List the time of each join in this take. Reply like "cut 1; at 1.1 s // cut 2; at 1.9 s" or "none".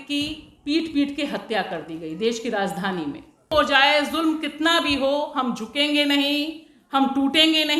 none